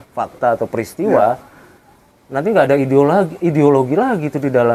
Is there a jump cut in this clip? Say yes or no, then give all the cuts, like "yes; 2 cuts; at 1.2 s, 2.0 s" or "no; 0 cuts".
no; 0 cuts